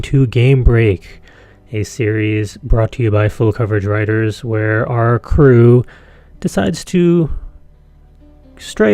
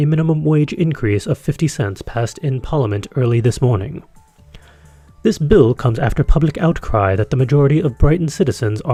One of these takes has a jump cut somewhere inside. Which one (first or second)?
first